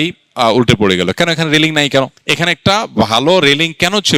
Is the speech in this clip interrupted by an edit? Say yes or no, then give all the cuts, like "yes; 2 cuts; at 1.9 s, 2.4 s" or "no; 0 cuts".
yes; 1 cut; at 2.2 s